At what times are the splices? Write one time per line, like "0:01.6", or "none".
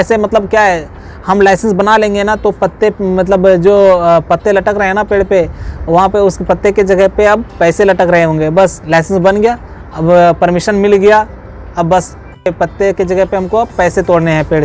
0:12.4